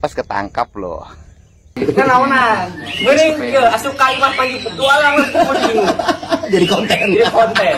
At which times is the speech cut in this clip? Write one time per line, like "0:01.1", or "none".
0:01.8